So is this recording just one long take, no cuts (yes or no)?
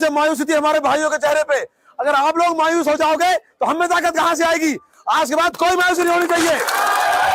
yes